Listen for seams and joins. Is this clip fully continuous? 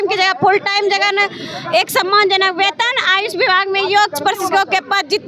yes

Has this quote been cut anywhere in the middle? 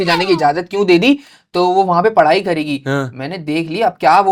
no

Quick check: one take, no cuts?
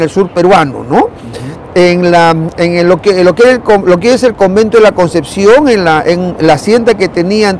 yes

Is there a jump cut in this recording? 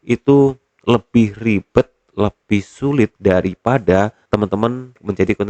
yes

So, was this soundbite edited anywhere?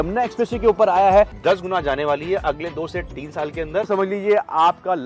yes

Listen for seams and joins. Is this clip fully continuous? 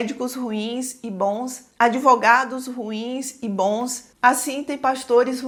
yes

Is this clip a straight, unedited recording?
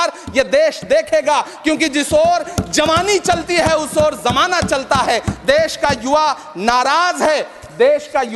yes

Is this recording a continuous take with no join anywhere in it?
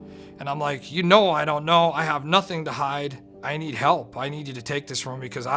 no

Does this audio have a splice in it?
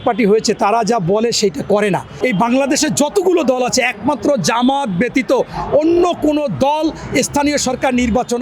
yes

